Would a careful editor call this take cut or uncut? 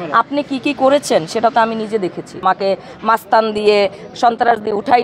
cut